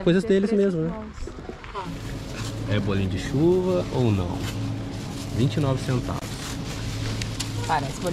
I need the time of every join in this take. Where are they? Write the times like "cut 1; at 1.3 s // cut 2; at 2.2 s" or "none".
cut 1; at 1.9 s